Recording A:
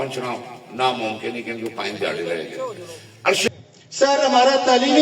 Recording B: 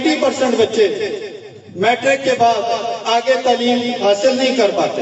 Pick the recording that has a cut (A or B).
A